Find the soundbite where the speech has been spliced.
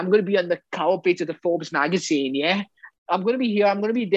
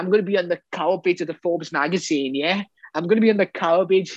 first; 1 cut; at 2.9 s

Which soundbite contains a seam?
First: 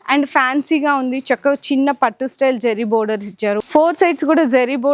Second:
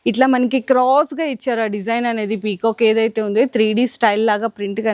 first; 1 cut; at 3.6 s

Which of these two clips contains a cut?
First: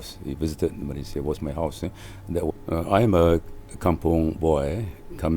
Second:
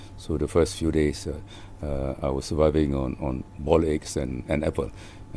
first; 1 cut; at 2.5 s

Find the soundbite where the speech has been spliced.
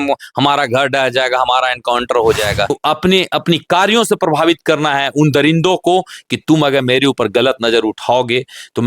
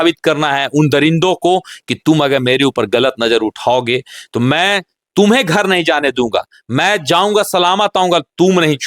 first; 1 cut; at 2.8 s

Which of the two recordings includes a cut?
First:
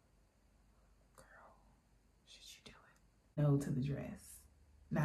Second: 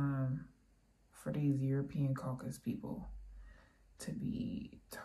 first; 1 cut; at 3.4 s

